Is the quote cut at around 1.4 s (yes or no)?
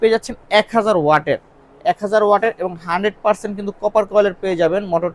no